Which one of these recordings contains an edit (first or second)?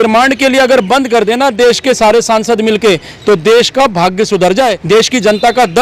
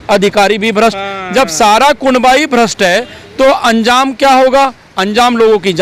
first